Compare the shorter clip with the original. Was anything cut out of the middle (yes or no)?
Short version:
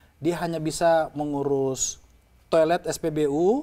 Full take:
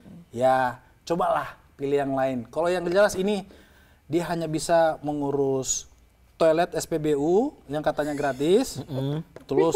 no